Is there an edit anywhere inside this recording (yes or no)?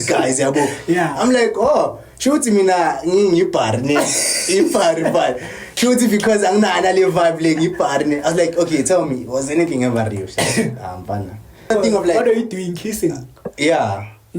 yes